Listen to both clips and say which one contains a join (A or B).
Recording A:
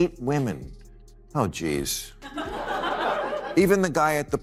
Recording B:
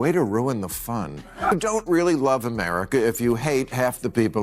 B